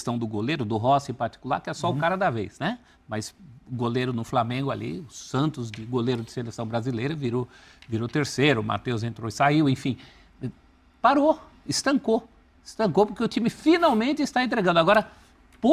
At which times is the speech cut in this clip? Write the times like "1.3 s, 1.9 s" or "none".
none